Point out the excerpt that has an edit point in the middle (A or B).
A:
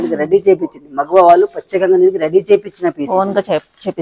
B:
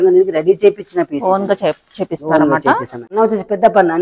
B